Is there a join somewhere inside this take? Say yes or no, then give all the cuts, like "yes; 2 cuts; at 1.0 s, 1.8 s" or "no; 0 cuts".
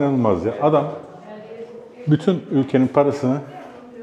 no; 0 cuts